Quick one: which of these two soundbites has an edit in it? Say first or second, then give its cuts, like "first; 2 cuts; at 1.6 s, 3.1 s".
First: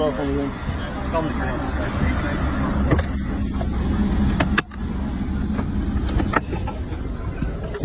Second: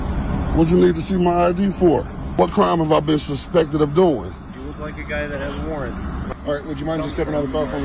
second; 2 cuts; at 2.2 s, 6.3 s